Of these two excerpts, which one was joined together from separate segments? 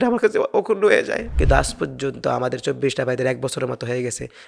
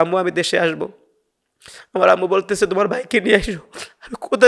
first; 1 cut; at 1.3 s

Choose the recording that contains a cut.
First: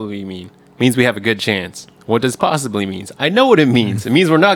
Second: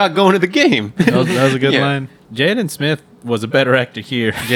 second; 1 cut; at 2.2 s

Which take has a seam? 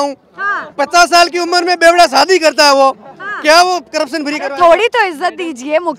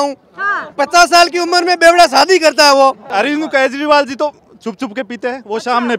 second; 1 cut; at 3.0 s

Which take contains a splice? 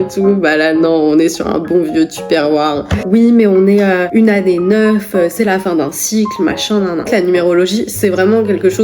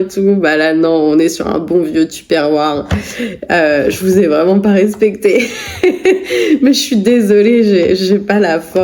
first; 2 cuts; at 3.0 s, 7.1 s

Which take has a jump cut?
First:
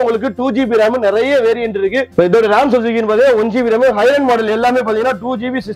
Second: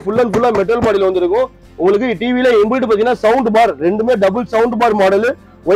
first; 1 cut; at 2.1 s

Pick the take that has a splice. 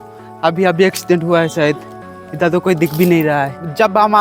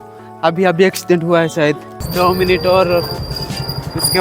second; 1 cut; at 2.1 s

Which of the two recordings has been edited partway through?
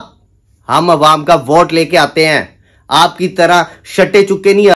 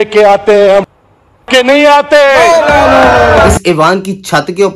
second; 1 cut; at 3.5 s

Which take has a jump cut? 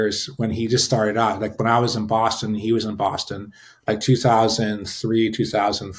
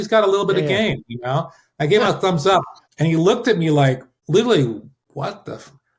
second; 3 cuts; at 2.8 s, 4.1 s, 5.0 s

